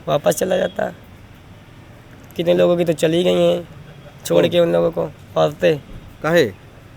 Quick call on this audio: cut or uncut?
uncut